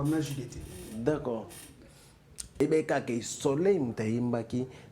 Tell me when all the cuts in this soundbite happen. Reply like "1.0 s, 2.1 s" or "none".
2.6 s